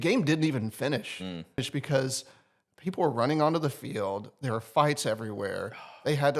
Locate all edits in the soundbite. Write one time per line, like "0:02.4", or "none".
0:01.7